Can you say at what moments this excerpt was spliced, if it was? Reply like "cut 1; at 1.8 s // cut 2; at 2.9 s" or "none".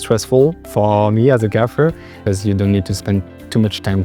cut 1; at 2.2 s